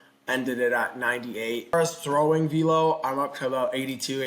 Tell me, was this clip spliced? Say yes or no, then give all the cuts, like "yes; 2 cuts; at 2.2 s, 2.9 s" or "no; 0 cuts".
yes; 1 cut; at 1.7 s